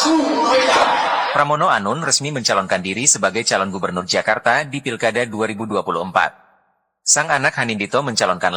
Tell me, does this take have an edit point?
yes; 1 cut; at 1.2 s

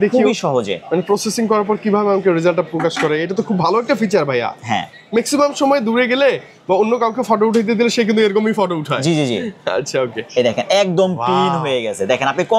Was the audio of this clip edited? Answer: no; 0 cuts

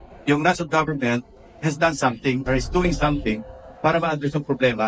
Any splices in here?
no; 0 cuts

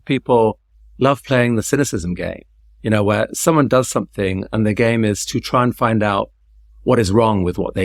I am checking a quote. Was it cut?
no; 0 cuts

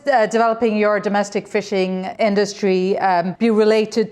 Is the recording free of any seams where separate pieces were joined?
no; 2 cuts; at 2.1 s, 3.3 s

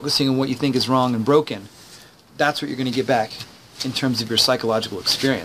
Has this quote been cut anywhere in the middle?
no; 0 cuts

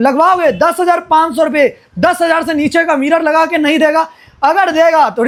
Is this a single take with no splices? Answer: yes; 0 cuts

